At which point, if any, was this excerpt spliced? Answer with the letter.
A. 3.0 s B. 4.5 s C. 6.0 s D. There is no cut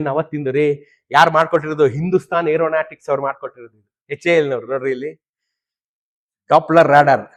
D